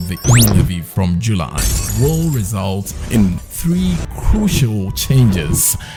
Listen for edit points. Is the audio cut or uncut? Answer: uncut